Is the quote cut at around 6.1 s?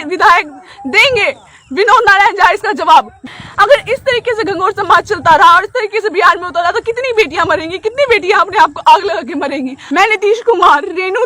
no; 2 cuts; at 3.2 s, 9.8 s

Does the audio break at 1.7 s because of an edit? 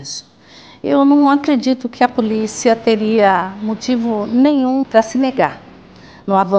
no; 1 cut; at 4.9 s

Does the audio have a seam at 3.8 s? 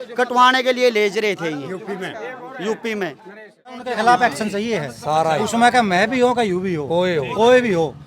yes; 1 cut; at 3.8 s

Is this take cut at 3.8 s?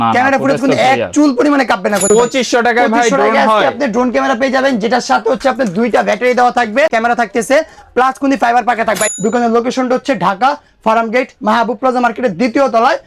no; 3 cuts; at 2.1 s, 6.9 s, 9.0 s

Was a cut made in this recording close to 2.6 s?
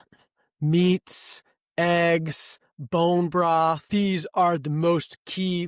no; 1 cut; at 3.8 s

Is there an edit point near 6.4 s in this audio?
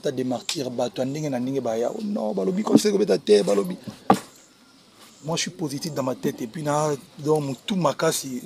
no; 0 cuts

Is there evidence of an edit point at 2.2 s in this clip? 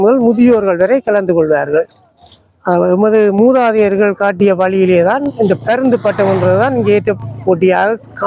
no; 0 cuts

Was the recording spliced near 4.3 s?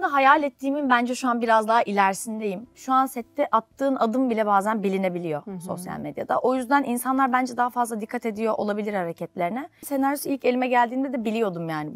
no; 2 cuts; at 2.8 s, 9.9 s

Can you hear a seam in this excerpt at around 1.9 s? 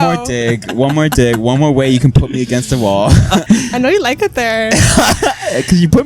no; 1 cut; at 3.4 s

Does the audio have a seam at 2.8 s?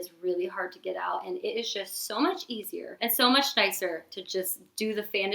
yes; 1 cut; at 2.8 s

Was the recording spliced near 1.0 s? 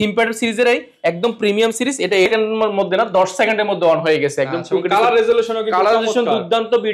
no; 1 cut; at 2.3 s

